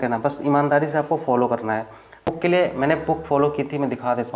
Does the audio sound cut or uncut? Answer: cut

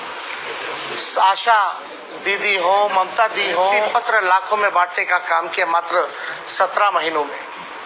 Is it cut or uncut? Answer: cut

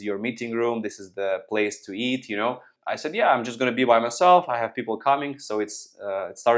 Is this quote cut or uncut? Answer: cut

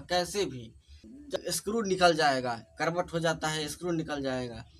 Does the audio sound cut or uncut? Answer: cut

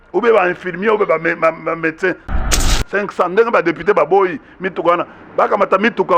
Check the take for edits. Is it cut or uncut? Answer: cut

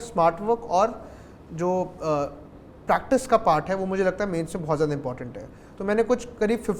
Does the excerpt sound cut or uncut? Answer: uncut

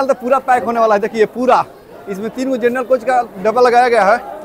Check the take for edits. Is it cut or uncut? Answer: uncut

